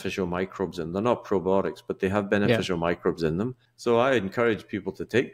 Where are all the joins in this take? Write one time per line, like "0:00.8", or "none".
0:03.7